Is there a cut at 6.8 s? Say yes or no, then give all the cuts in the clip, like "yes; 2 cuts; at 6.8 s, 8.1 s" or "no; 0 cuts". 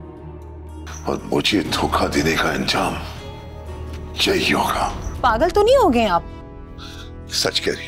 no; 1 cut; at 5.0 s